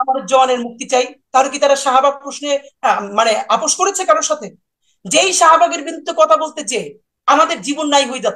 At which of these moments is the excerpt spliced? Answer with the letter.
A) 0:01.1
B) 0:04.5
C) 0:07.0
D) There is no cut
D